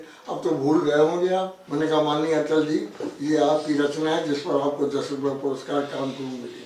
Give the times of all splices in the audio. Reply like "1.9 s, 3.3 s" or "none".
1.6 s